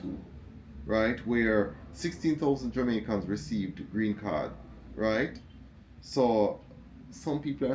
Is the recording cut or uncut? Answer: uncut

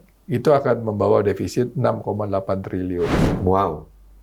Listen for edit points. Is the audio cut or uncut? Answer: cut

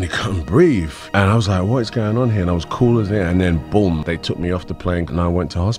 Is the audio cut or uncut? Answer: uncut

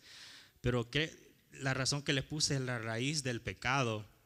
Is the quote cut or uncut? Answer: uncut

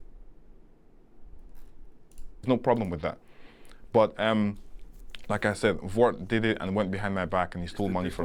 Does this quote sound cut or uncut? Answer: uncut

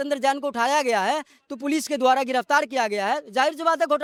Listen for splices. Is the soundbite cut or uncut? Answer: uncut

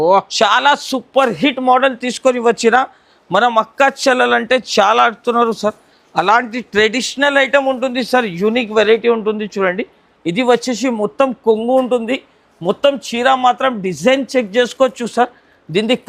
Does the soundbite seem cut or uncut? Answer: uncut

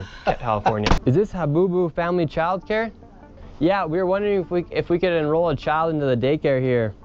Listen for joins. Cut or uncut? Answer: cut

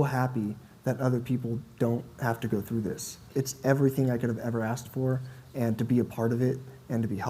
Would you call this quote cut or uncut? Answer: cut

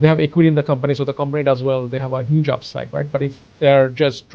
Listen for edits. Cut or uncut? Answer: cut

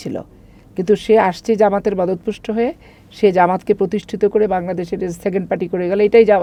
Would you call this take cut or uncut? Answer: uncut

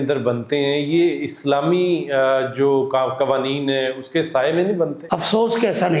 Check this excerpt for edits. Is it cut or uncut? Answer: cut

